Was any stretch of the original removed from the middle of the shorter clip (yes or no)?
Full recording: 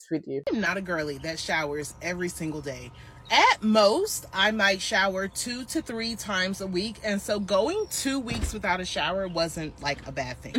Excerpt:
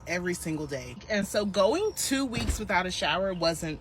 yes